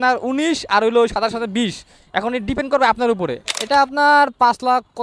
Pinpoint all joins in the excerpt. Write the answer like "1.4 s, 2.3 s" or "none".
3.4 s